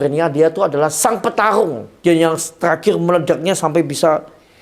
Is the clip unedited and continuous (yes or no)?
no